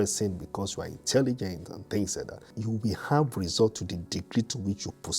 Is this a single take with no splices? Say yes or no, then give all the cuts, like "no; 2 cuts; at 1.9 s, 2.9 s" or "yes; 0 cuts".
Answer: no; 1 cut; at 2.6 s